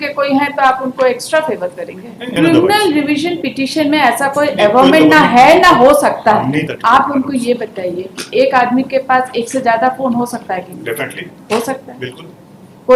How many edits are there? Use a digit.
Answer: 2